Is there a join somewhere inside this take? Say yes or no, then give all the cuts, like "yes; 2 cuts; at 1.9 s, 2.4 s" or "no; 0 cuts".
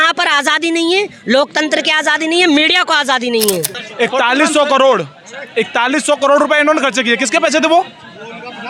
yes; 1 cut; at 3.8 s